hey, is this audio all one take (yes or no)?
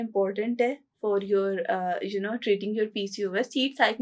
yes